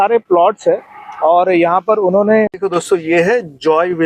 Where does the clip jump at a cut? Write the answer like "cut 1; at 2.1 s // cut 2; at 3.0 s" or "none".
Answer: cut 1; at 2.5 s